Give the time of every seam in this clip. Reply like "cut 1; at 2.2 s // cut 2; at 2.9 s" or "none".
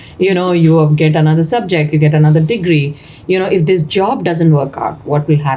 none